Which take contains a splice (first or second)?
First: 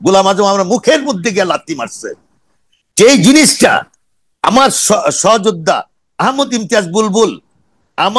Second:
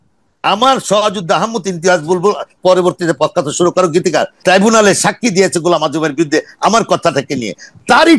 second